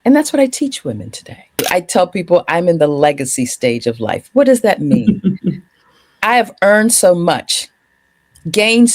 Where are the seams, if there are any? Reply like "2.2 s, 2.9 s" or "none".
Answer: 1.6 s